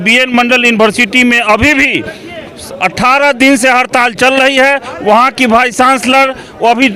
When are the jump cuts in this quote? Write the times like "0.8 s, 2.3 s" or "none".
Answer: none